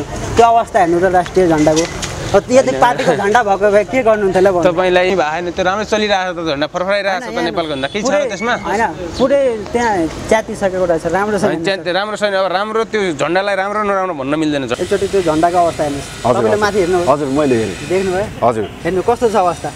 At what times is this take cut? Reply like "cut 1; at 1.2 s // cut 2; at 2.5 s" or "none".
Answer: cut 1; at 5.1 s // cut 2; at 14.7 s